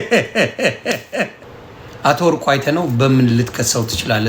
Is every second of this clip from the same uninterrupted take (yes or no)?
no